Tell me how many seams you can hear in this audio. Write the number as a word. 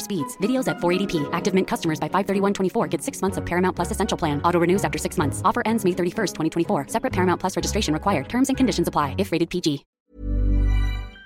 one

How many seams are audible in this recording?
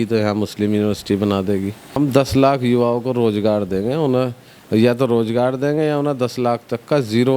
one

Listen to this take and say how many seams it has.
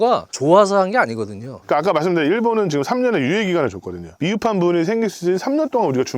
one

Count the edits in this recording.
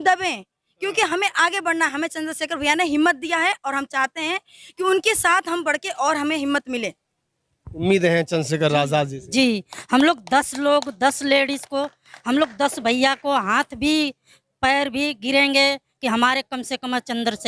one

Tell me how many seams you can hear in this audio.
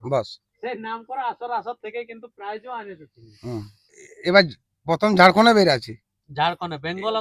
one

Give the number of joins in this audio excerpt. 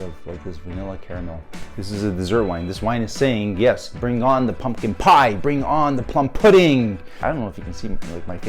two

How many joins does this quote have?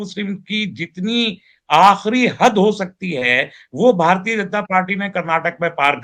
zero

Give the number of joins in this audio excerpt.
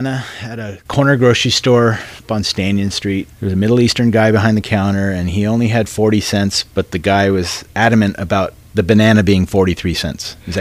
zero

